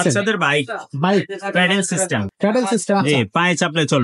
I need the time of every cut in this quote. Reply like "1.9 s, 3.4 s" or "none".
none